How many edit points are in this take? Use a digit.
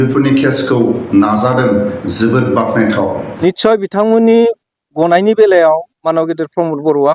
1